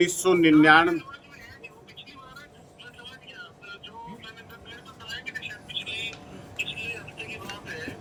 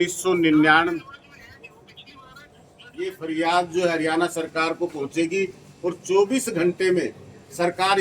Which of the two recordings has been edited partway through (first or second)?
second